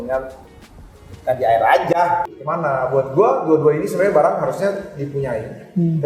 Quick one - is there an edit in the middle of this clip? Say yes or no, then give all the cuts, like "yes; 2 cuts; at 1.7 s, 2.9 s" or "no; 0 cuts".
yes; 1 cut; at 2.3 s